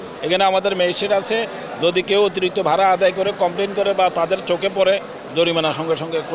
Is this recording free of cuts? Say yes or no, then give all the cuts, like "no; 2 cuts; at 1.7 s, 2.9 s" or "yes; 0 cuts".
yes; 0 cuts